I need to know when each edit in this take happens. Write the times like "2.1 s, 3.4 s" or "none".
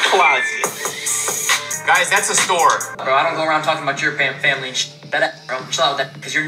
1.7 s, 2.9 s